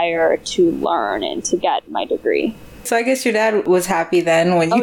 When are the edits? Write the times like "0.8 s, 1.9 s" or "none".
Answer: 2.8 s, 3.6 s

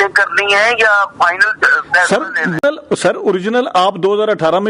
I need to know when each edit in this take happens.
2.6 s

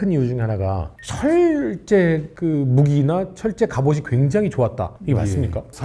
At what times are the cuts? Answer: none

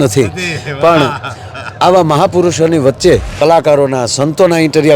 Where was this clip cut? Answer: 3.4 s

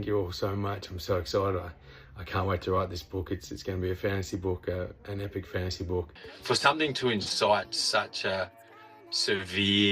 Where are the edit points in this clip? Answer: 6.2 s

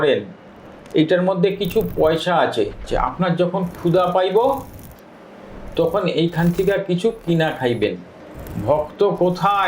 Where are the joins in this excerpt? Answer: 2.9 s

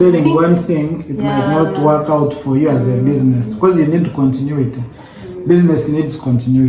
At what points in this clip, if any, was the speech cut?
none

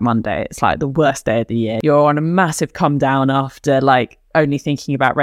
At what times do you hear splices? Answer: 1.8 s

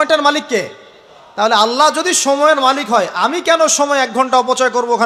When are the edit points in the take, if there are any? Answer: none

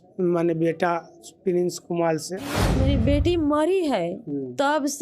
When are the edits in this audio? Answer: 2.7 s

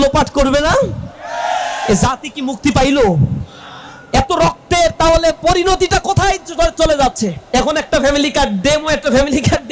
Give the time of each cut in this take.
7.4 s

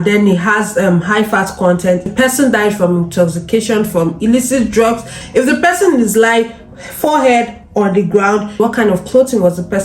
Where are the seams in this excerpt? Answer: 2.1 s, 5.2 s, 8.6 s

